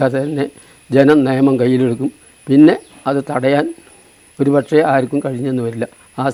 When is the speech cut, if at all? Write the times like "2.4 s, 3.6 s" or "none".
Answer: none